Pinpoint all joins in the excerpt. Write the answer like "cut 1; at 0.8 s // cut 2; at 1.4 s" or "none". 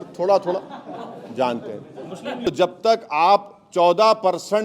cut 1; at 2.5 s